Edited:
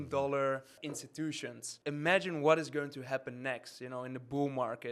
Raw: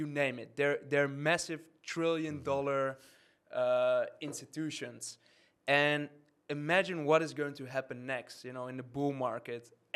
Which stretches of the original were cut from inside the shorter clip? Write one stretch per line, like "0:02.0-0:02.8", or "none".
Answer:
0:03.6-0:05.9